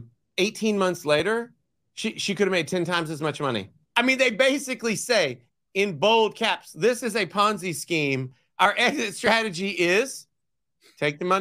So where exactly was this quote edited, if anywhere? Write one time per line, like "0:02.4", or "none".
0:03.8